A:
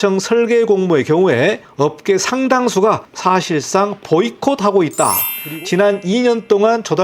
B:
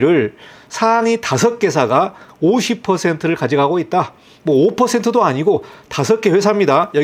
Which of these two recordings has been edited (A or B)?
A